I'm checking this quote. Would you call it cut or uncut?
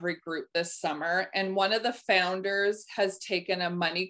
uncut